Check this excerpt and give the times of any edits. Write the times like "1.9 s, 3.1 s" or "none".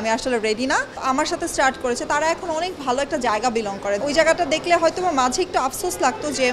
1.0 s, 4.0 s